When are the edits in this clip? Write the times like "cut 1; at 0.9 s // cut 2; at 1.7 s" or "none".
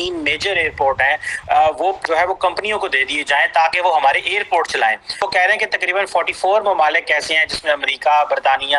cut 1; at 2.0 s // cut 2; at 5.1 s

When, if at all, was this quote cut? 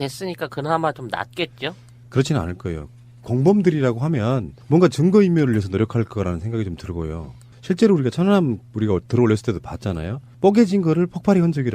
none

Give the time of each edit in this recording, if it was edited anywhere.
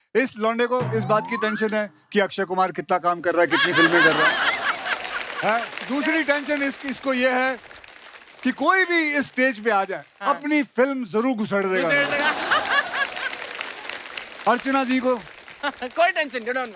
none

